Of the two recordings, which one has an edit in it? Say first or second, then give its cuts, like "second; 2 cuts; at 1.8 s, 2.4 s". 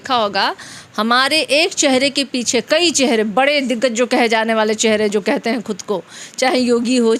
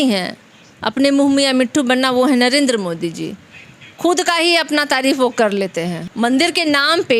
second; 1 cut; at 6.0 s